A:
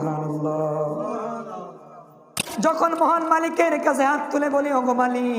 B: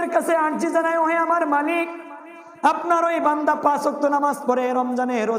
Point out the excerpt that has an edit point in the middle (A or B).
A